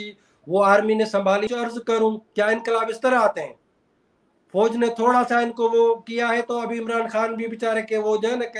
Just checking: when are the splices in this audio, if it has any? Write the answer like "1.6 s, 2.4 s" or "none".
1.5 s